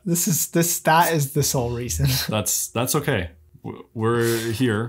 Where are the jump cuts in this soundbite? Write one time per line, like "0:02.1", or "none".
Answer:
none